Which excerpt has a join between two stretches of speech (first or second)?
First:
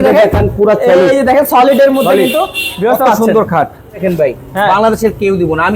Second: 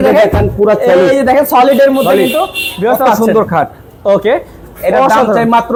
first